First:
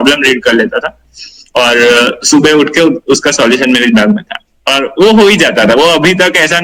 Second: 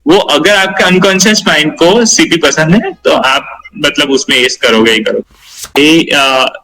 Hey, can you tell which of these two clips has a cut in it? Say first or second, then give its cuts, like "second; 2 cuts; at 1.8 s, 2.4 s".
second; 1 cut; at 5.6 s